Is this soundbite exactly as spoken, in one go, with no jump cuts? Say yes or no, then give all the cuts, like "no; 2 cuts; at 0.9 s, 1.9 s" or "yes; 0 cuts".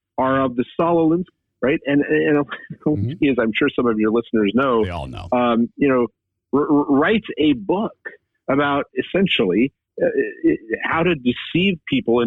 no; 1 cut; at 1.4 s